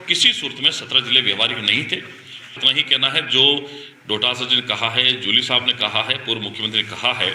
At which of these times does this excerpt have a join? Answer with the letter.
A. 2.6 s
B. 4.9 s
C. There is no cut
A